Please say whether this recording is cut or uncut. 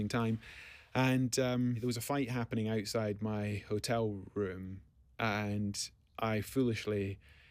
cut